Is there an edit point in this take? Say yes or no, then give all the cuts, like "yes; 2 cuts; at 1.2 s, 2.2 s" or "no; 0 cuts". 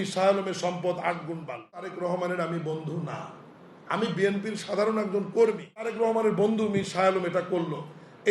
yes; 2 cuts; at 1.9 s, 5.9 s